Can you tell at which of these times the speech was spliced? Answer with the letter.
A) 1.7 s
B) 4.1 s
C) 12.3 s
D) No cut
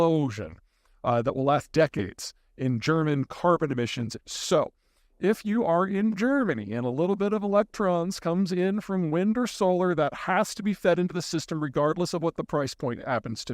B